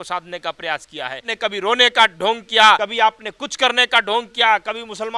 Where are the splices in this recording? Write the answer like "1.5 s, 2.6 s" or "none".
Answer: 1.3 s, 2.8 s